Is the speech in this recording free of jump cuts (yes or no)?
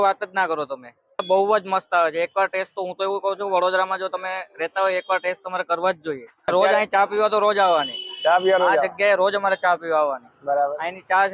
no